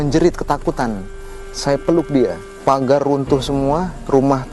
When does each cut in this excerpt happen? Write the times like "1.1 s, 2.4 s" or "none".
2.5 s